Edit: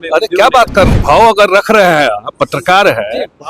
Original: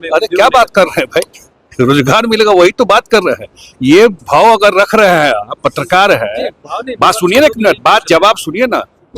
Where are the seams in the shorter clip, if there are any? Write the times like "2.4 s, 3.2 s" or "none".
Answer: 1.0 s